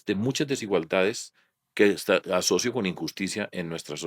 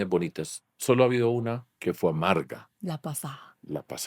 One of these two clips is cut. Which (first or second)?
second